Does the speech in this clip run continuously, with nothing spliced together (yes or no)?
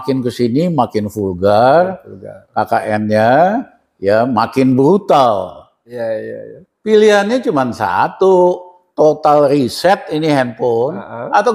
no